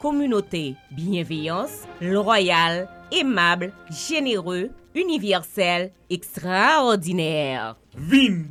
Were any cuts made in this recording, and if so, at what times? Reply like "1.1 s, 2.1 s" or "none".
none